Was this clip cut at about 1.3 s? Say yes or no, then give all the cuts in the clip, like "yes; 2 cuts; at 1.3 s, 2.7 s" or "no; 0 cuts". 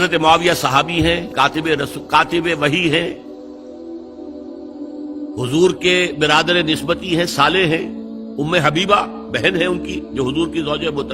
yes; 1 cut; at 1.3 s